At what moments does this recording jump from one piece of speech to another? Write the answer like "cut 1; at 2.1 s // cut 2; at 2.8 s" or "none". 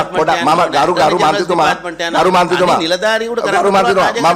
none